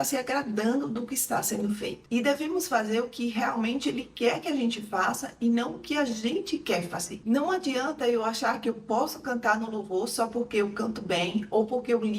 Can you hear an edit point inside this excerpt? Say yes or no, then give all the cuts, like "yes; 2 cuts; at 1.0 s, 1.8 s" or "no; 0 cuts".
yes; 2 cuts; at 2.0 s, 7.2 s